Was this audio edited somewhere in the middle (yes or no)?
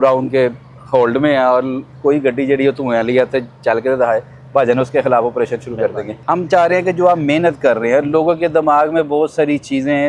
no